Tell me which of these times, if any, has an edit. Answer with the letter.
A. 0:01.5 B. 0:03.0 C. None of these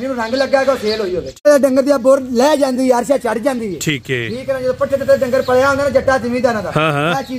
A